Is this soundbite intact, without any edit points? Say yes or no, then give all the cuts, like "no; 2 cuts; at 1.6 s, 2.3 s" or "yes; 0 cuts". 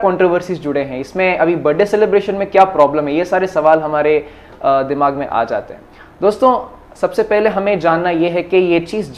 yes; 0 cuts